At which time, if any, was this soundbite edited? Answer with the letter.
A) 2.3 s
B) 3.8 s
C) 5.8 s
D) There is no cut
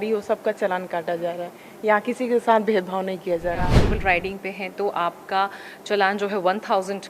B